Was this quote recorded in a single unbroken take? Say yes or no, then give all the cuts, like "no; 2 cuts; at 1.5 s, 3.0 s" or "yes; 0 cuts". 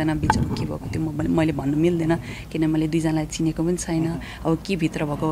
yes; 0 cuts